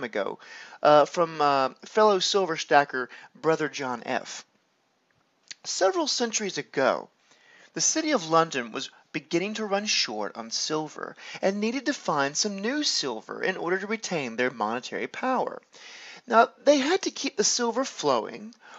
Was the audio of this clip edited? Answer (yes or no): yes